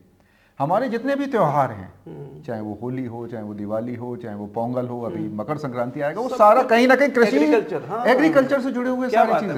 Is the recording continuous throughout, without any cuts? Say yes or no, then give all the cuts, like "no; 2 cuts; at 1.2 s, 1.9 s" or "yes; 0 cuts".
yes; 0 cuts